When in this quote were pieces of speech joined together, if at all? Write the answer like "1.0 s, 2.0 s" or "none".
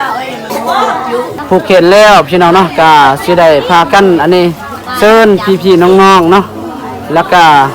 1.4 s